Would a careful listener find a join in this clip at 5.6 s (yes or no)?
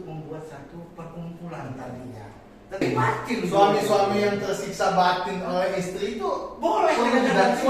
no